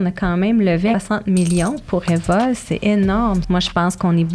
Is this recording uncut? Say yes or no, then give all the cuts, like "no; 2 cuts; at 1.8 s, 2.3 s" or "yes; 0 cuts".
no; 2 cuts; at 0.9 s, 3.4 s